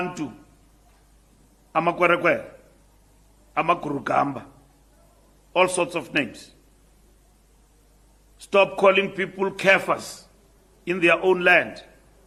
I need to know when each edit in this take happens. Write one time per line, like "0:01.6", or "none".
none